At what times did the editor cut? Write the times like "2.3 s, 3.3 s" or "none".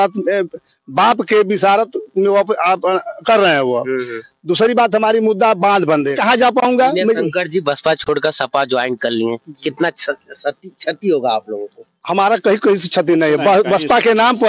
6.2 s